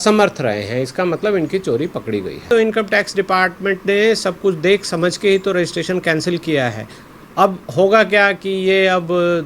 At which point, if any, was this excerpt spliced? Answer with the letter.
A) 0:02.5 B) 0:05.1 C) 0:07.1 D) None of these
A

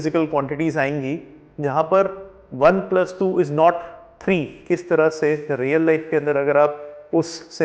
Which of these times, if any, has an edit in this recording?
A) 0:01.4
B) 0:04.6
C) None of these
B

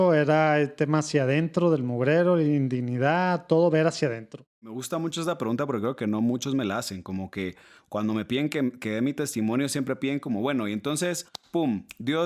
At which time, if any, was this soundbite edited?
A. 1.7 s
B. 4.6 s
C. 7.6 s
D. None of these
B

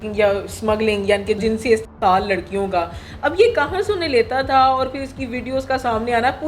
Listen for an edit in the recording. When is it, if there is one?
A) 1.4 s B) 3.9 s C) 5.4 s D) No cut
A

